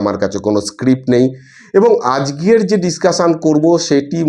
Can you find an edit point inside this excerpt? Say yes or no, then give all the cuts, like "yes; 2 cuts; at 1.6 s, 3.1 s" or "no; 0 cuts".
no; 0 cuts